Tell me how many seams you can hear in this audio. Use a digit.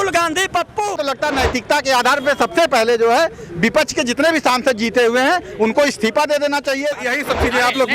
2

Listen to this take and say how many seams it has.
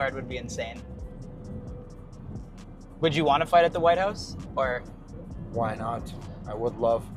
0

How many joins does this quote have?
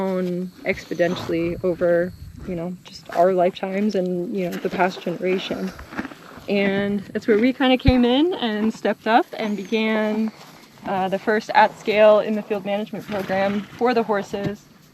0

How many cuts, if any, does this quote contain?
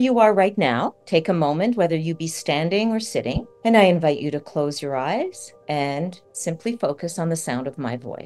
4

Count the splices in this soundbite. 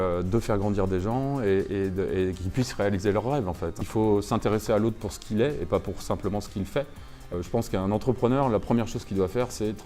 2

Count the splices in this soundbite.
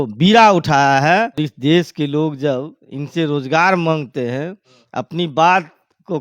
1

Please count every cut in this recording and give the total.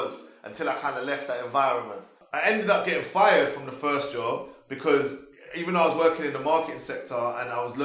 1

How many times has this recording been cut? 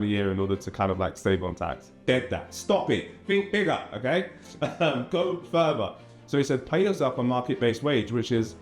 0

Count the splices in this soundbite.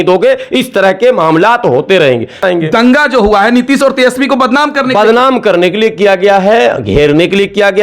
1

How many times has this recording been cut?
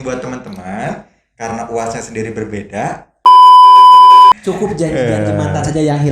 2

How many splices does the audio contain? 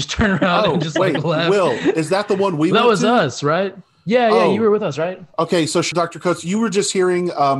1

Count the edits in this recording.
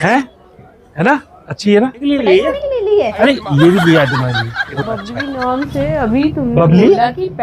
2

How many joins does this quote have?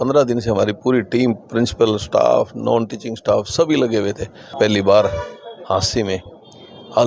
1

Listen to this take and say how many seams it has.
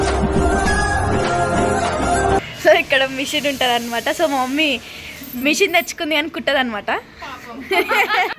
1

